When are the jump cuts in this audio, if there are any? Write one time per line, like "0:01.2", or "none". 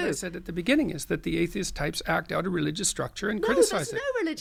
none

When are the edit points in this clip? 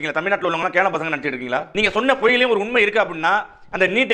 0:01.7

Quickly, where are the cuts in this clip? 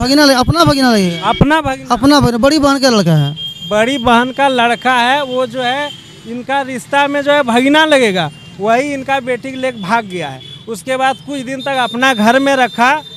none

